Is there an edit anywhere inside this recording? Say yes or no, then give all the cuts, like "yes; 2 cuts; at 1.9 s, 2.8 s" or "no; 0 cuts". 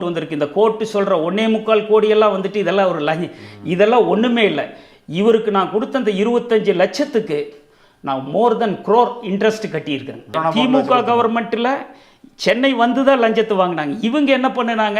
yes; 1 cut; at 10.4 s